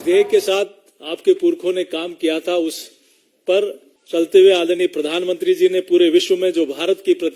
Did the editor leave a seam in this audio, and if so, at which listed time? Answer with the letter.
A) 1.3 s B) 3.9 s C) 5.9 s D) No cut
B